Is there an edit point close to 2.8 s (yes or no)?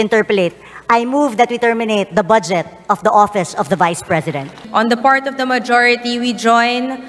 no